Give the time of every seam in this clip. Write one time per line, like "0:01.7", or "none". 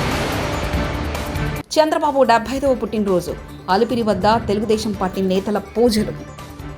none